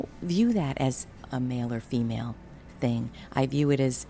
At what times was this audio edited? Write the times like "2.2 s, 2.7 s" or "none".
1.2 s